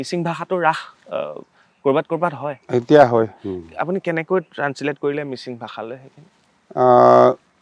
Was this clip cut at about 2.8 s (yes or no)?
no